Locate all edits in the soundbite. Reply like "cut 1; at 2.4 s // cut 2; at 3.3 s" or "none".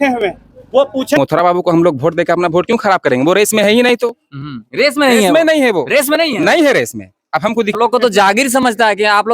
cut 1; at 1.2 s // cut 2; at 7.7 s